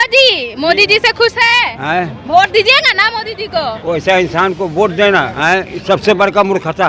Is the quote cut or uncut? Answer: cut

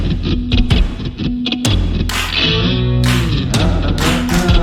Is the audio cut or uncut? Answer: uncut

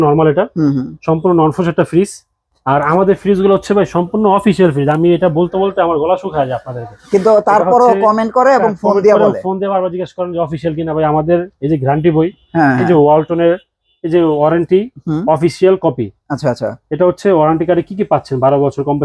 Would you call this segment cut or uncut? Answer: uncut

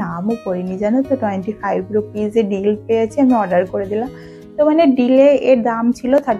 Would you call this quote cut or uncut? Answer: uncut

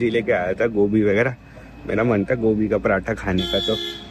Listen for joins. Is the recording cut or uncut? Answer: uncut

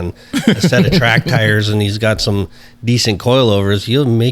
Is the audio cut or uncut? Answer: uncut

